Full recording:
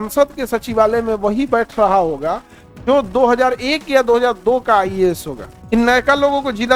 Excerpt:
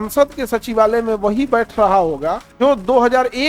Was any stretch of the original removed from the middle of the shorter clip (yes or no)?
yes